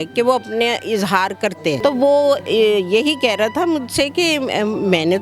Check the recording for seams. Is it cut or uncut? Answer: cut